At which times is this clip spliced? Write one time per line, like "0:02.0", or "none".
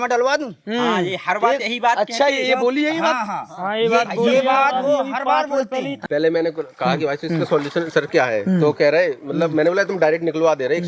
0:06.0